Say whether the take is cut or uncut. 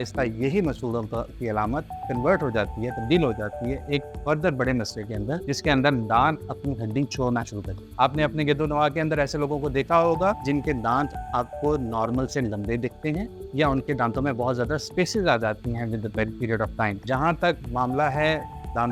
uncut